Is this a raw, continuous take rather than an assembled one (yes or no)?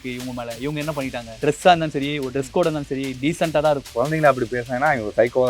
no